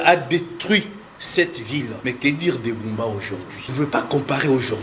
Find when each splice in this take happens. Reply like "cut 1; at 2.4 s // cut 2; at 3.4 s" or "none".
cut 1; at 1.9 s // cut 2; at 3.7 s